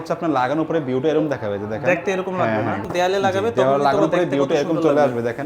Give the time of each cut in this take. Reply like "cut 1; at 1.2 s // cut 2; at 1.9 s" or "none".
cut 1; at 2.8 s